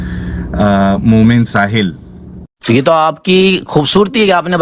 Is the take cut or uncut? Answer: cut